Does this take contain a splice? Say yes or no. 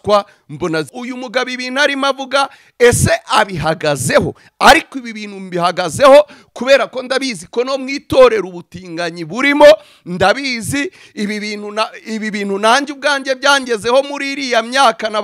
yes